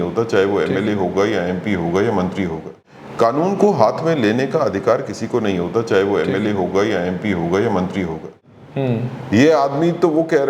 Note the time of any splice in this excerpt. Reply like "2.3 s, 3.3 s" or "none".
2.7 s, 8.3 s